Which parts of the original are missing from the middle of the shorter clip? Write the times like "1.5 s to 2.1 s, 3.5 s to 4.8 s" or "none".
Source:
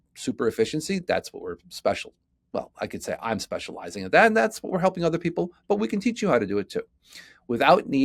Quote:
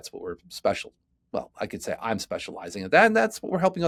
none